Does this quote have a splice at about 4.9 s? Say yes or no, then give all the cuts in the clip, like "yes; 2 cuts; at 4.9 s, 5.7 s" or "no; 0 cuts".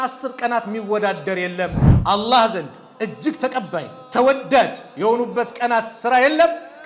no; 1 cut; at 1.9 s